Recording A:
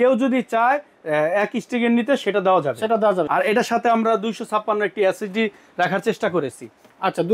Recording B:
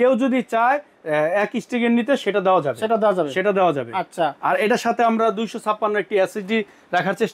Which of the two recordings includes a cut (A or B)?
A